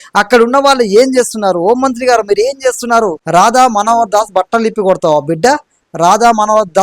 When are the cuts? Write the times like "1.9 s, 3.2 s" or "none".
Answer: 3.2 s

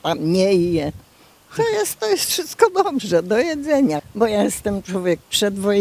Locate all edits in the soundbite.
4.1 s

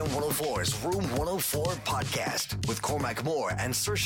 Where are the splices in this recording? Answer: none

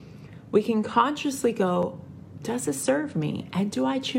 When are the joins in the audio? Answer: none

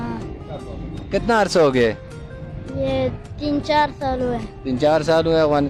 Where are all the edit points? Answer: none

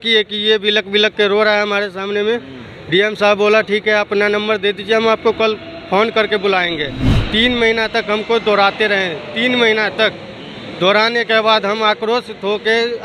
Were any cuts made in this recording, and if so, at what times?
none

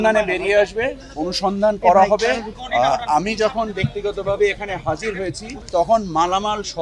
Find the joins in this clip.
2.5 s, 5.5 s

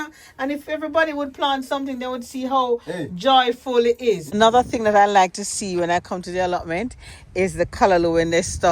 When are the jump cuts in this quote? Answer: 4.2 s

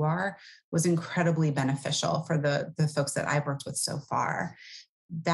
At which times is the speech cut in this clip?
none

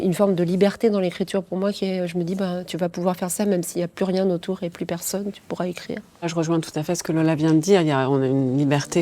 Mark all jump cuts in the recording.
6.3 s

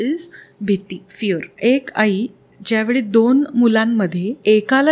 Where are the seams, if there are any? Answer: 1.5 s

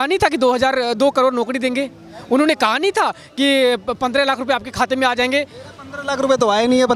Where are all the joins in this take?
none

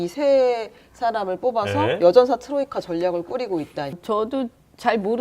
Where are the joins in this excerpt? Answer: 3.9 s

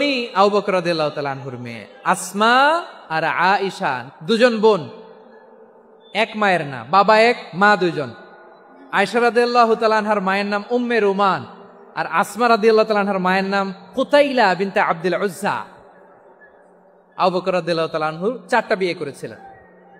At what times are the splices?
3.0 s, 4.0 s

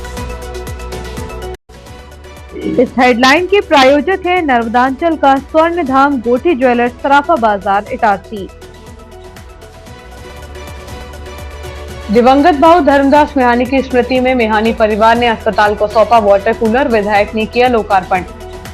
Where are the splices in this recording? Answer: 1.5 s

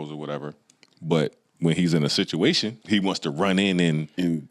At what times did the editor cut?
2.7 s

